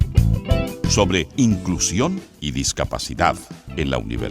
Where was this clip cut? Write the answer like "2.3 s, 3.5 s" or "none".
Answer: 1.0 s